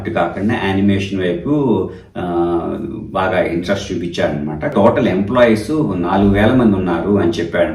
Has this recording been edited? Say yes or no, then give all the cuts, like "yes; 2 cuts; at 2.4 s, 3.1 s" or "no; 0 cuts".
yes; 1 cut; at 4.7 s